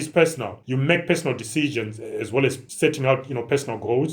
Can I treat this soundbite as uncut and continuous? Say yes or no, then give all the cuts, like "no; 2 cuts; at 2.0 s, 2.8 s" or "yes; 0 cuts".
no; 1 cut; at 2.6 s